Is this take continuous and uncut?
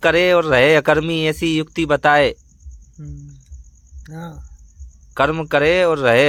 yes; 0 cuts

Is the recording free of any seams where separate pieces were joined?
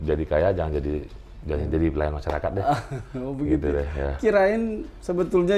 yes; 0 cuts

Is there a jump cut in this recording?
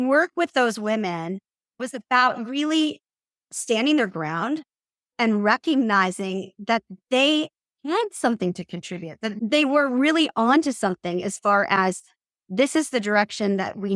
yes; 3 cuts; at 1.8 s, 3.5 s, 9.3 s

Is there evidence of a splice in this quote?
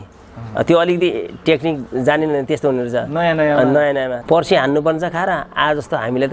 yes; 1 cut; at 4.2 s

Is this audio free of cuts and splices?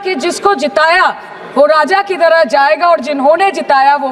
yes; 0 cuts

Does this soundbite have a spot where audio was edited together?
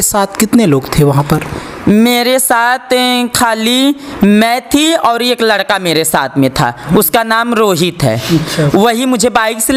no; 0 cuts

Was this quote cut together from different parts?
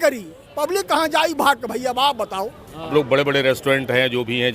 yes; 1 cut; at 2.9 s

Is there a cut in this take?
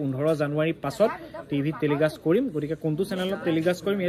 no; 0 cuts

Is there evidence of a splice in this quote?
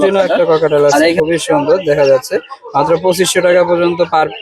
no; 0 cuts

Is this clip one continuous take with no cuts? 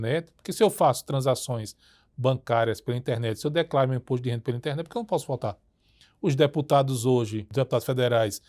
no; 1 cut; at 7.4 s

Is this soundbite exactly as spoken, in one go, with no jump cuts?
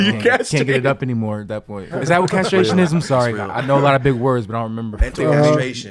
no; 1 cut; at 1.9 s

